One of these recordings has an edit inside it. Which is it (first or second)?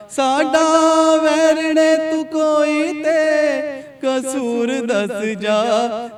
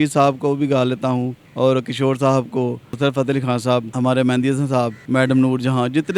second